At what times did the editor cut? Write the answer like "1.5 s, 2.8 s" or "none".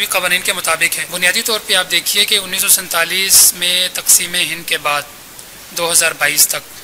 1.0 s